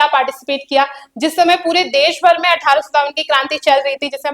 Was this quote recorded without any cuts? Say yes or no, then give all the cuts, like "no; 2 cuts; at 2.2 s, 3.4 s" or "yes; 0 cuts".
yes; 0 cuts